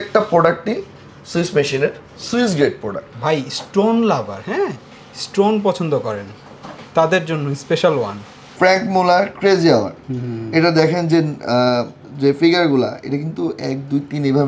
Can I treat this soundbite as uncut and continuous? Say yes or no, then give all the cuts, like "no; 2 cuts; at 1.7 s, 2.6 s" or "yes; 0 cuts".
no; 2 cuts; at 3.0 s, 8.4 s